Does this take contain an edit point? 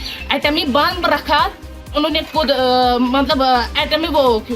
yes; 1 cut; at 1.9 s

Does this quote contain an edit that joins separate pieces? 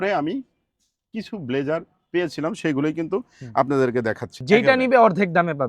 yes; 1 cut; at 4.3 s

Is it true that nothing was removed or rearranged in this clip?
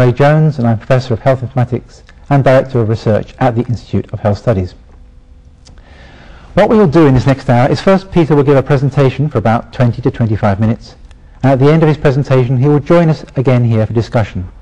no; 1 cut; at 6.0 s

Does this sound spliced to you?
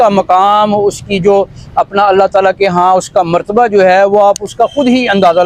no; 0 cuts

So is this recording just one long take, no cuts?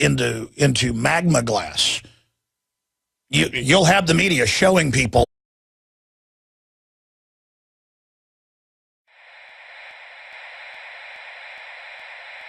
yes; 0 cuts

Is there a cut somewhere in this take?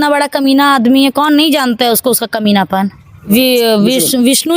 yes; 1 cut; at 3.3 s

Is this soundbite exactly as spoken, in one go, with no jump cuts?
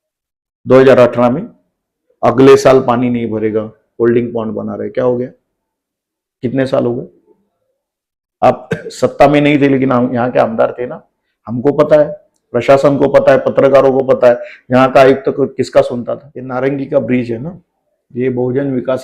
no; 1 cut; at 16.3 s

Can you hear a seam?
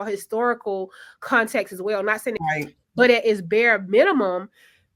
yes; 1 cut; at 2.4 s

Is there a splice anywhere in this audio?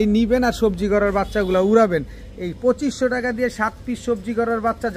no; 0 cuts

